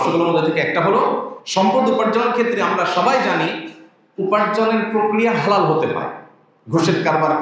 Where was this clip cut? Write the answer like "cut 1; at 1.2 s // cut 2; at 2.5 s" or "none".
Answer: cut 1; at 1.3 s